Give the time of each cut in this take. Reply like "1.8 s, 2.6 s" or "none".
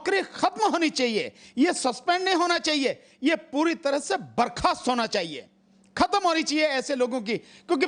none